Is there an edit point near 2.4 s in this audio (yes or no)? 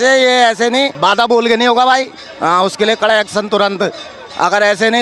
no